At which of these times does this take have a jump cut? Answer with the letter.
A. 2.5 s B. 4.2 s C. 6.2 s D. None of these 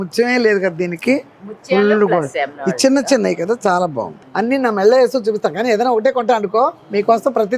B